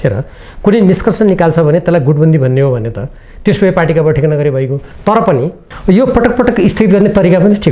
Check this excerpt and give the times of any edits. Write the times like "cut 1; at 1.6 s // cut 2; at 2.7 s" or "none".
cut 1; at 5.7 s